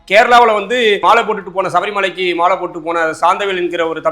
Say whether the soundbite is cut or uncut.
cut